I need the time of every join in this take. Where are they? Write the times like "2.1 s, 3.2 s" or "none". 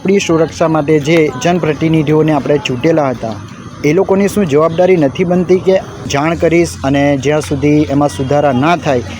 6.1 s